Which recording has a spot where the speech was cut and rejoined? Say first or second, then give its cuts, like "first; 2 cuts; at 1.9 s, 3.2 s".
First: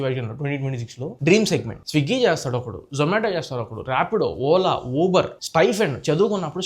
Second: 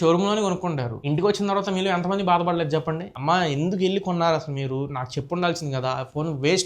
first; 1 cut; at 1.7 s